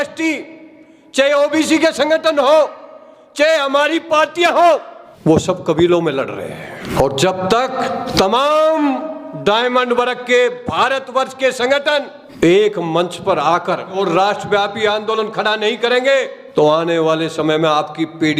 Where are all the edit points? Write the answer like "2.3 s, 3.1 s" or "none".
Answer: 14.0 s